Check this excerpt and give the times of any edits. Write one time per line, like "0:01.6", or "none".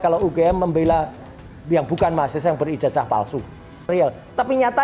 0:03.9